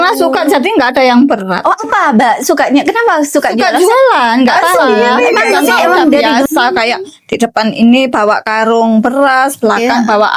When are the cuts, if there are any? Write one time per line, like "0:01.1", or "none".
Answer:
0:06.5